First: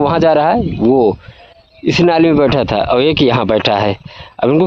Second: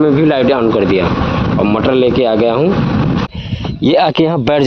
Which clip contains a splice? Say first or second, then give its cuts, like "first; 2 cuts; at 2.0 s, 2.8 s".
second; 1 cut; at 3.3 s